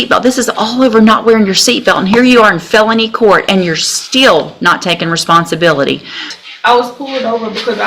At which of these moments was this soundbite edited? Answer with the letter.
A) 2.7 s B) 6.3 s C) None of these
B